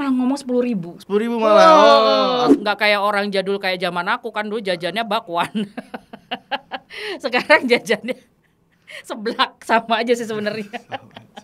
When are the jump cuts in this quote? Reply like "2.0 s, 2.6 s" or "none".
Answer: 2.5 s